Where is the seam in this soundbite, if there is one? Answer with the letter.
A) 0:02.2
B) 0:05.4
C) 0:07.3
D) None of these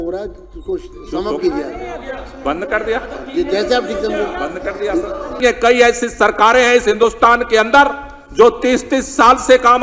B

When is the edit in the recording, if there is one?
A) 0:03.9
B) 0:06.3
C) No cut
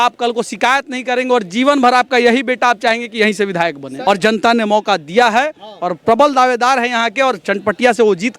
A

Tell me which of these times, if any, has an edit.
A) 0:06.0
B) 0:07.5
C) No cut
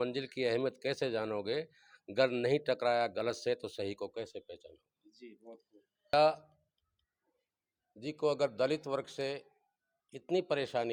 C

